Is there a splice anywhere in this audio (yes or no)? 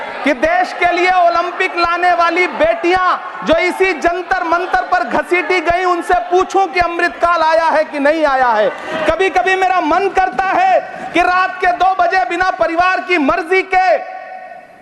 no